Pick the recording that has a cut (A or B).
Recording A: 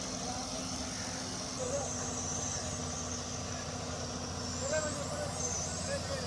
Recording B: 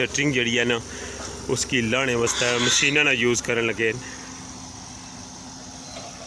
A